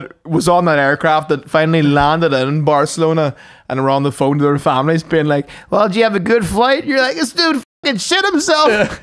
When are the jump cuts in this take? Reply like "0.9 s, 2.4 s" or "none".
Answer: none